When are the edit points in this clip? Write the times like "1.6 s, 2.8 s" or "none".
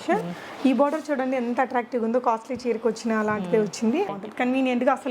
4.1 s